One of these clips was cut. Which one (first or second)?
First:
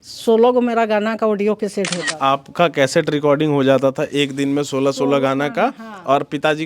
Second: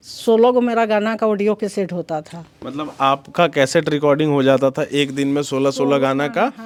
first